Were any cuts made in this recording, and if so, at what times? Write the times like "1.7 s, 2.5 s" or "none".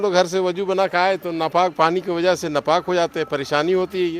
none